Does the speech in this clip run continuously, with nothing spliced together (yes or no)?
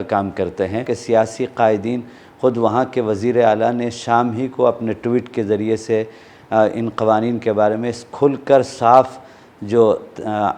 no